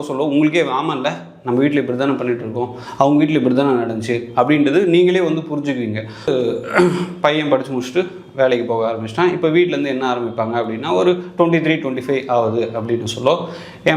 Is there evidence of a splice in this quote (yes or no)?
yes